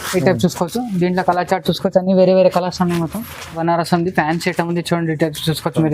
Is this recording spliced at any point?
yes; 1 cut; at 3.6 s

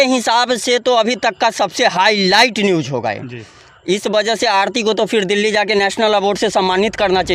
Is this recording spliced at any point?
no; 0 cuts

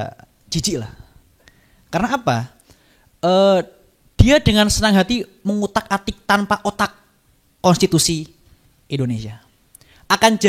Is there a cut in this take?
no; 0 cuts

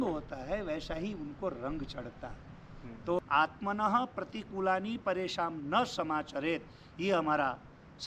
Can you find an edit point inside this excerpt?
yes; 1 cut; at 3.2 s

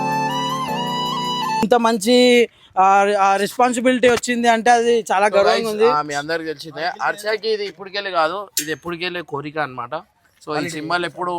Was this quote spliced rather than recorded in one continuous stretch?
yes; 1 cut; at 1.6 s

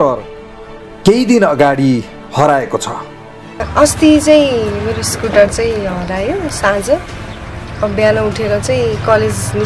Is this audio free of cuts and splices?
no; 1 cut; at 3.6 s

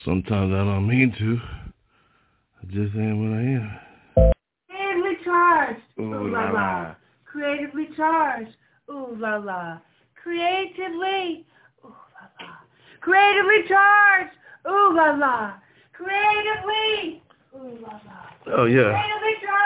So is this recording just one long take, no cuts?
no; 1 cut; at 4.3 s

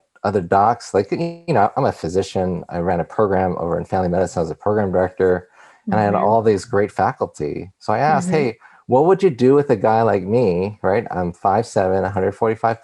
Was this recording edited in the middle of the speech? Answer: no; 0 cuts

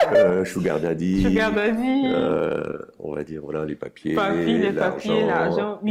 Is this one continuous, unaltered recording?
yes; 0 cuts

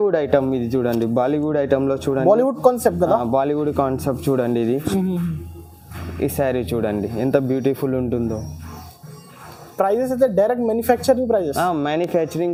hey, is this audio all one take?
yes; 0 cuts

